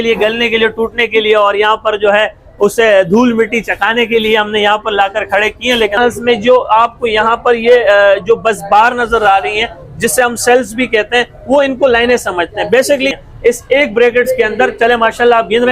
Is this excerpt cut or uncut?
cut